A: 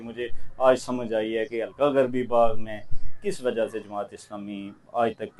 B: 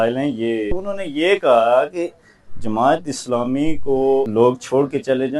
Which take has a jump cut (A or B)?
B